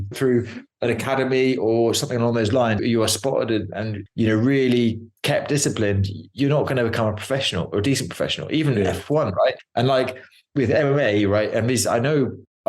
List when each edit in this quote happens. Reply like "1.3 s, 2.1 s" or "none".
2.8 s, 10.1 s